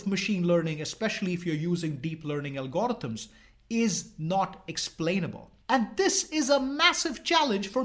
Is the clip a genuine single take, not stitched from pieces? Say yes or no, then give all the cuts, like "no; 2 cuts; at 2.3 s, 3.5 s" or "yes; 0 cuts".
yes; 0 cuts